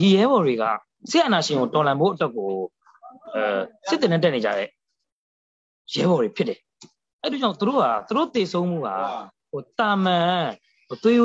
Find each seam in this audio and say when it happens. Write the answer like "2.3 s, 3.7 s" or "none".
0.9 s